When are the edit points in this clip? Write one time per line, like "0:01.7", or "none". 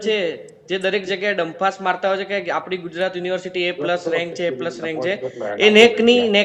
none

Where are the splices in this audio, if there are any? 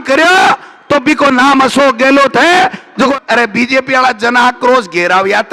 0:03.1

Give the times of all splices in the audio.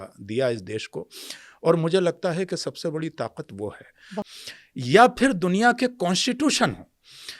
0:04.1

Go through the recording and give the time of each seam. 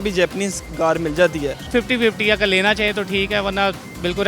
0:01.6

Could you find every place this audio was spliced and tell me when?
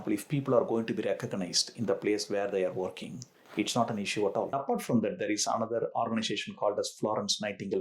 0:04.5

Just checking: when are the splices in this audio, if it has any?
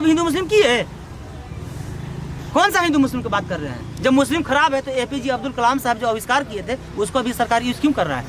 none

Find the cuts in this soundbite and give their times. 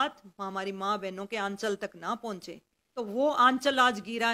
0:03.0

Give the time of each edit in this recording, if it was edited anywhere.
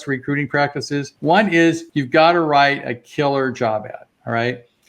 0:01.1
0:01.9

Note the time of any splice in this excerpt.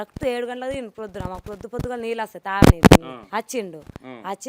0:03.2

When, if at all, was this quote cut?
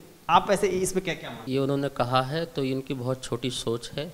0:01.4

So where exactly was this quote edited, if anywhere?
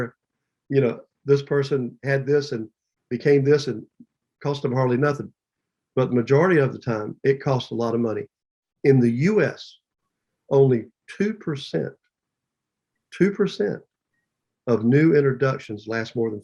none

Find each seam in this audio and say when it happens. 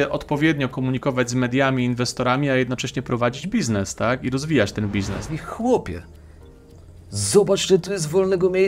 0:05.3

